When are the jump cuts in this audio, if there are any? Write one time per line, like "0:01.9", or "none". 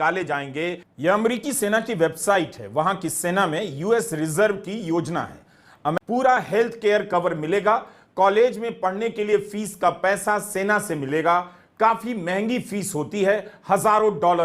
0:06.0